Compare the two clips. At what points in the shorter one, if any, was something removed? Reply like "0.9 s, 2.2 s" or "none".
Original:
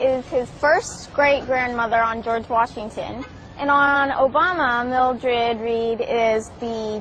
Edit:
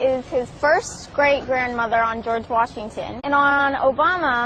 3.1 s